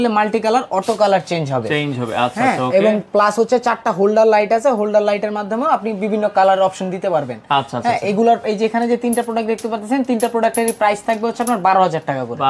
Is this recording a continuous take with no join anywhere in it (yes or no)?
yes